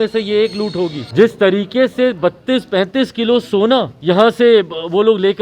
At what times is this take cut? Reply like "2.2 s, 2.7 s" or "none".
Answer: 1.0 s, 3.9 s